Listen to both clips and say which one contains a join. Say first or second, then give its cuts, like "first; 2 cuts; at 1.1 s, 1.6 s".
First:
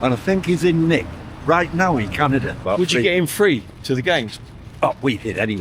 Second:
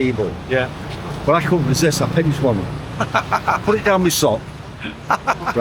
first; 1 cut; at 2.6 s